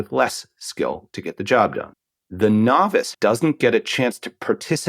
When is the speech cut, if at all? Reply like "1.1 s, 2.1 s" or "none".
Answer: 1.9 s, 3.1 s